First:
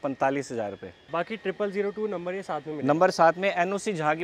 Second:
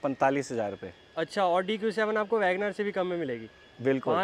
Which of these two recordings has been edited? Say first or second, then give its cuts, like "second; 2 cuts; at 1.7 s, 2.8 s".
first; 1 cut; at 1.0 s